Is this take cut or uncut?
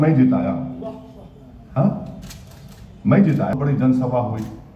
cut